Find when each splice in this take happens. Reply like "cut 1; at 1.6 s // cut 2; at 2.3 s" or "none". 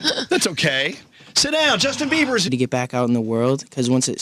none